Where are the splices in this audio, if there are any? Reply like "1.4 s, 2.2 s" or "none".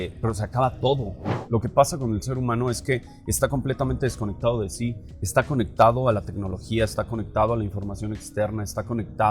1.3 s